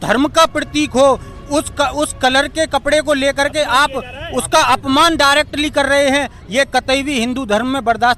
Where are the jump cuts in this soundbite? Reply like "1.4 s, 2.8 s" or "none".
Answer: none